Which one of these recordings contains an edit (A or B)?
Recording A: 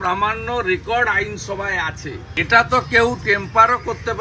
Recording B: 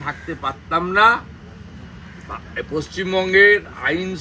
A